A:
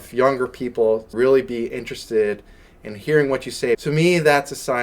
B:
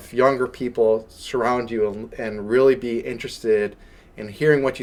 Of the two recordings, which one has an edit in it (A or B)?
A